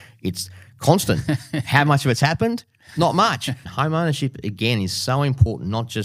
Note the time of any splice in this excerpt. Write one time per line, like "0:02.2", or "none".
0:03.7